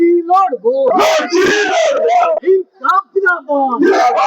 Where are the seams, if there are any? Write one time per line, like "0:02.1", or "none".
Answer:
none